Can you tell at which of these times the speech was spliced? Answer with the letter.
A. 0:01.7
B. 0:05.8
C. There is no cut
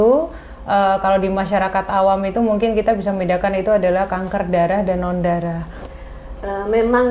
B